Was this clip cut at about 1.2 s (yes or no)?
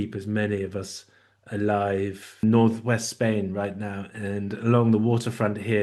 no